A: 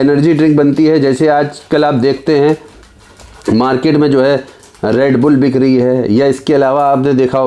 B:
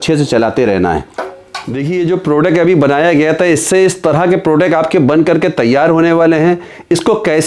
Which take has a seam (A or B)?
B